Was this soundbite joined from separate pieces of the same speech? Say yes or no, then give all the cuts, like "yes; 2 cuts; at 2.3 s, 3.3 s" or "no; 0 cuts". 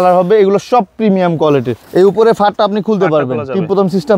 yes; 1 cut; at 1.8 s